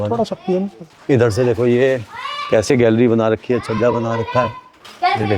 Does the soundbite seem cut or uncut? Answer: uncut